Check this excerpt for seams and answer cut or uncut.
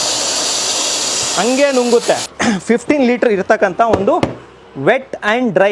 cut